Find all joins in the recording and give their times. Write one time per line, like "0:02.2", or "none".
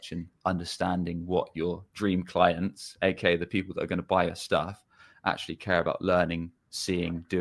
none